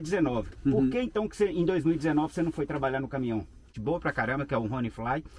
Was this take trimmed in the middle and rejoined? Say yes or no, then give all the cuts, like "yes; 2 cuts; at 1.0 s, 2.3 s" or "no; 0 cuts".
yes; 1 cut; at 3.8 s